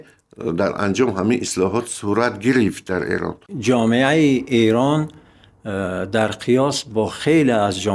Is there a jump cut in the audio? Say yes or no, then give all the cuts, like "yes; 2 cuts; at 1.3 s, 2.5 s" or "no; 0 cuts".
yes; 1 cut; at 3.5 s